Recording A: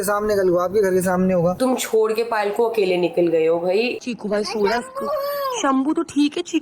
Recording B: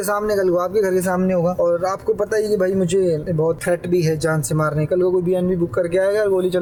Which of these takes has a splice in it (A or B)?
A